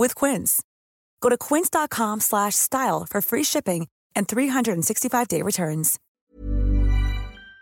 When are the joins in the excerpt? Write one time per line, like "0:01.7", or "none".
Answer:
0:06.0